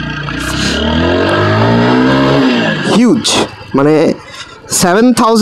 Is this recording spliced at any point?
no; 0 cuts

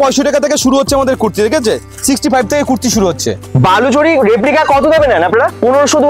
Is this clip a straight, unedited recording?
no; 1 cut; at 3.4 s

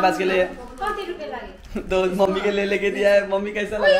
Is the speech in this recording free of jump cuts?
no; 1 cut; at 1.6 s

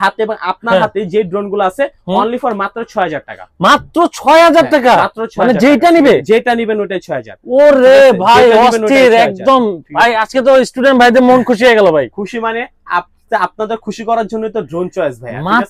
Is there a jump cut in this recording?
no; 0 cuts

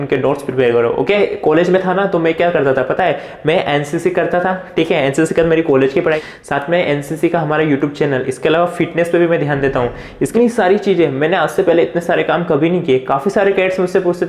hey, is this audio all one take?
no; 3 cuts; at 1.1 s, 6.2 s, 10.3 s

